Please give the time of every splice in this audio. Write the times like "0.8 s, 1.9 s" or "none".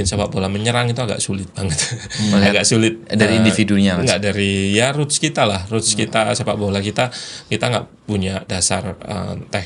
none